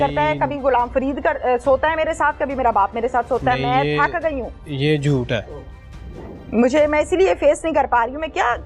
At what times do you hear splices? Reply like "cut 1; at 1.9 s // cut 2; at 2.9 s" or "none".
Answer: none